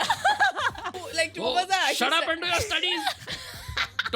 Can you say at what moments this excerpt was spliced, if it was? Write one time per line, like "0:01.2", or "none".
0:01.0